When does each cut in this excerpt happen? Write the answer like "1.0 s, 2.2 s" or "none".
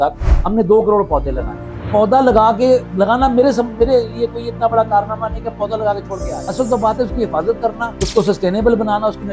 1.9 s, 2.9 s, 6.4 s, 7.9 s